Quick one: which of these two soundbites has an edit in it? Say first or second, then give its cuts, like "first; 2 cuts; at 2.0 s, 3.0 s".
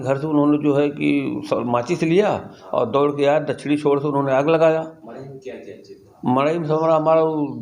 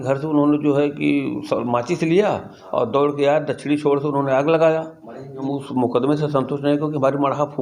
second; 1 cut; at 5.4 s